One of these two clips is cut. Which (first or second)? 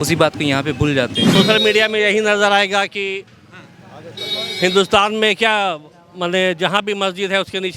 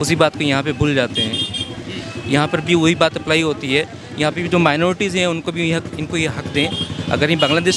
first